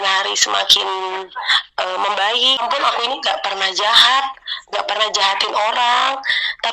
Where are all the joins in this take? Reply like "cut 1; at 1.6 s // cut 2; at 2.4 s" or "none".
cut 1; at 2.6 s

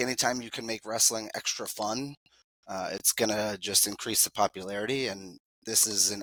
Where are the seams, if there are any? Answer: none

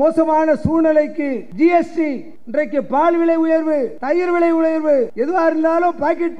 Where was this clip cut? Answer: cut 1; at 1.4 s // cut 2; at 2.3 s // cut 3; at 3.9 s // cut 4; at 5.1 s

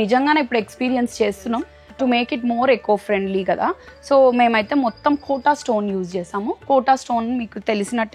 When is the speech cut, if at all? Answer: cut 1; at 1.8 s

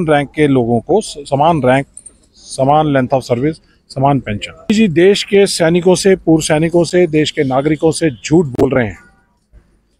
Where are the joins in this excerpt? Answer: cut 1; at 4.7 s

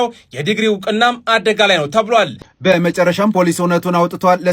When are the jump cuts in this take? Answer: cut 1; at 2.4 s

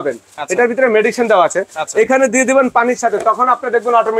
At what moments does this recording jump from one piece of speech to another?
none

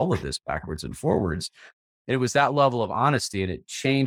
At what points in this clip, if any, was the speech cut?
none

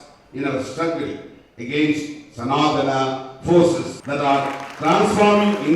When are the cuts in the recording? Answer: cut 1; at 4.0 s

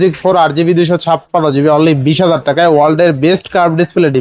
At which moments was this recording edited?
none

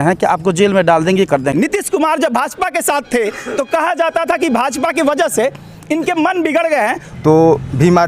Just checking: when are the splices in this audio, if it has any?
cut 1; at 1.5 s // cut 2; at 7.0 s

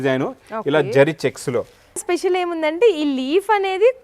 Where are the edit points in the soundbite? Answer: cut 1; at 2.0 s

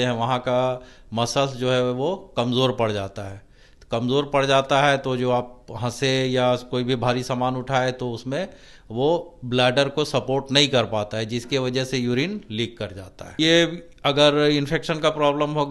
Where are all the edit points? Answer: cut 1; at 13.4 s

